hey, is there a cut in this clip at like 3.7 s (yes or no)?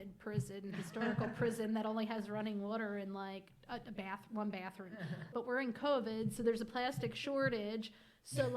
no